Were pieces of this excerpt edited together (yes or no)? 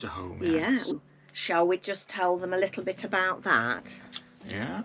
yes